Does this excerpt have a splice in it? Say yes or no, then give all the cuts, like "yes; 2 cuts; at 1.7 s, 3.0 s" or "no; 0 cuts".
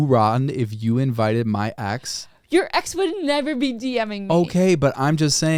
no; 0 cuts